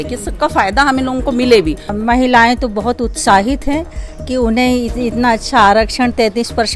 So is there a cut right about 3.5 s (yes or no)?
no